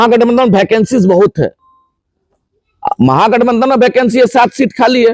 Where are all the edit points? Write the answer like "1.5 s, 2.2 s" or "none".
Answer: none

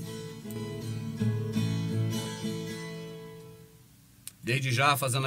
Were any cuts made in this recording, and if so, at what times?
1.6 s

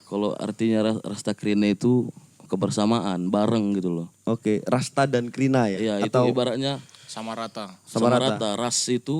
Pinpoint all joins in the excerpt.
4.1 s

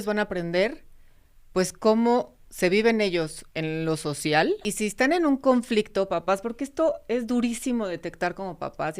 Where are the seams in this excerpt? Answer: 3.4 s, 4.7 s

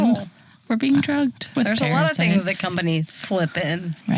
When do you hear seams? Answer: 1.5 s

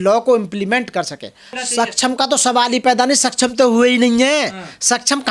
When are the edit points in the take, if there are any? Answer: 1.5 s

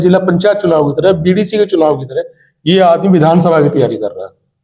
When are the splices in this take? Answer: none

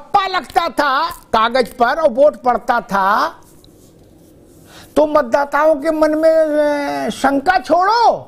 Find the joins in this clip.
none

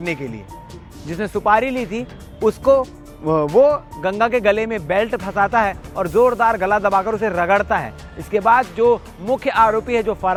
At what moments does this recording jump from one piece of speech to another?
none

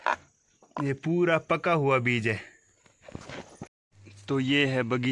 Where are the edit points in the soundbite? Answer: 3.8 s

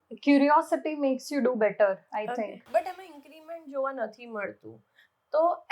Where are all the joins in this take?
2.6 s

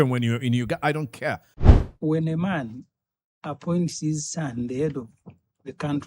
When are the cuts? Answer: 1.5 s

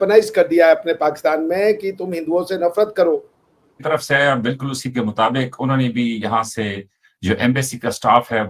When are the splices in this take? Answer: 3.8 s

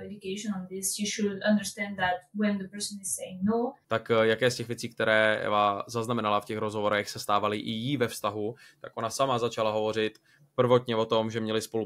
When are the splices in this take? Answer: 3.8 s

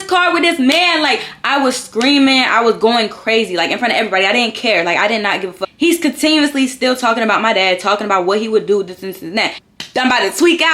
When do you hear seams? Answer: 5.6 s, 9.6 s

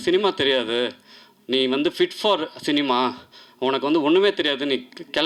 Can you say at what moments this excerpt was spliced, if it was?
none

